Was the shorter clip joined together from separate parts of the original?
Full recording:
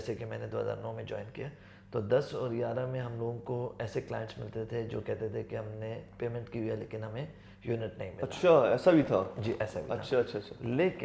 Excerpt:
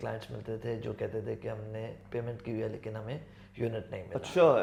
no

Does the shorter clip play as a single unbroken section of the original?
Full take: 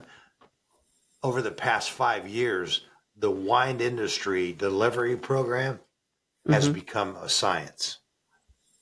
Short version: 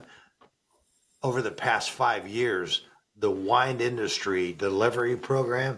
yes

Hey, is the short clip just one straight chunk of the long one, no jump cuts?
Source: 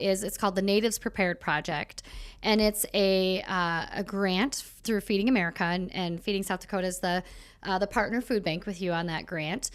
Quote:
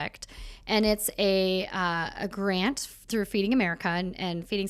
yes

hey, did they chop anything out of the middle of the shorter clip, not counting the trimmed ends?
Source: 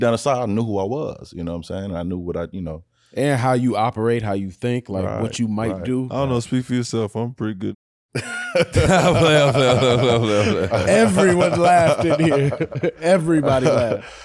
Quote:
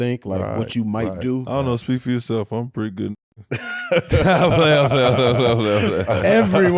no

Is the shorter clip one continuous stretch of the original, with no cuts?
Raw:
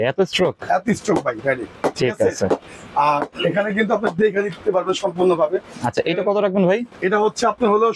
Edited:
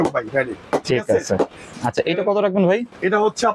no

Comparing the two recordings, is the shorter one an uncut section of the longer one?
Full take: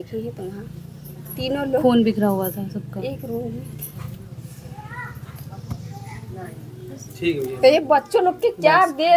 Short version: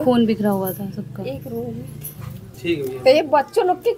no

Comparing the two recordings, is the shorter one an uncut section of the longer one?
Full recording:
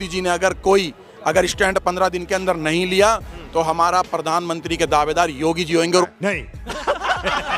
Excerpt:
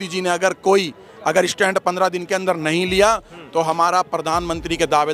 yes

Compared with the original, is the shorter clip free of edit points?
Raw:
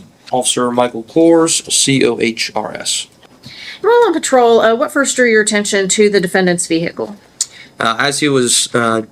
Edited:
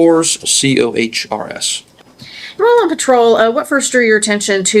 yes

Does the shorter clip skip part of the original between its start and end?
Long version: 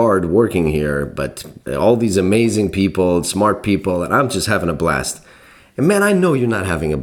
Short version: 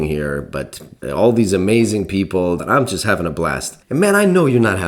yes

